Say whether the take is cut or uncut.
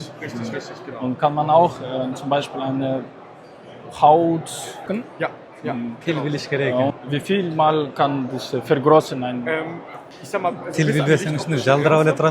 cut